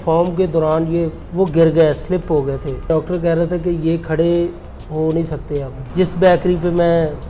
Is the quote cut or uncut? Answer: cut